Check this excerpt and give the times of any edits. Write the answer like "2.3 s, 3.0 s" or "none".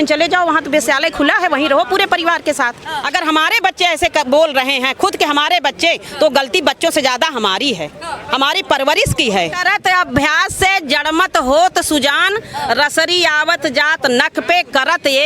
2.9 s, 9.6 s